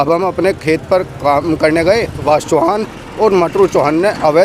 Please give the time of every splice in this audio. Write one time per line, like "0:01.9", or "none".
0:02.2